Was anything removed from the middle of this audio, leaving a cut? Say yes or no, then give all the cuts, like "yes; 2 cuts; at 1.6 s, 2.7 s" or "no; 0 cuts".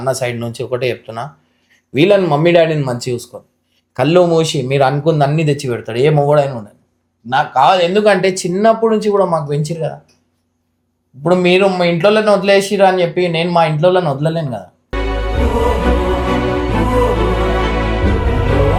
no; 0 cuts